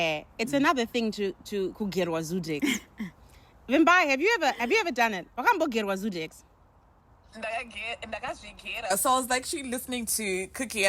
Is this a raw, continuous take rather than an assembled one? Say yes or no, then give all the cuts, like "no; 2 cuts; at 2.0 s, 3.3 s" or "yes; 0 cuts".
yes; 0 cuts